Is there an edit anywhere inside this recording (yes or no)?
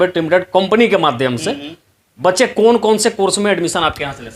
no